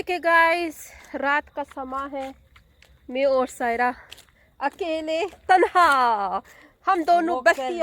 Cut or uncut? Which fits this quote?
uncut